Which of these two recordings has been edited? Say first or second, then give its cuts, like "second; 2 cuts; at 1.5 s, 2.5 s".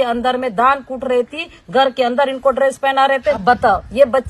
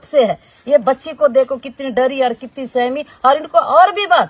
first; 1 cut; at 3.4 s